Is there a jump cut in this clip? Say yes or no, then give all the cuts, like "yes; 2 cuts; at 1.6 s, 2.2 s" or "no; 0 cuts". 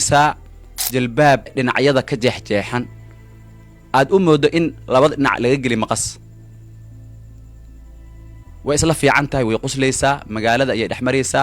yes; 1 cut; at 1.5 s